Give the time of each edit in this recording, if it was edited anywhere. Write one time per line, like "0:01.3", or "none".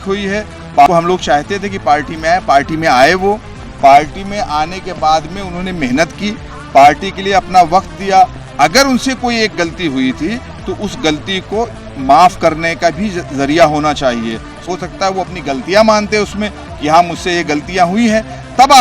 0:00.9
0:08.4
0:14.7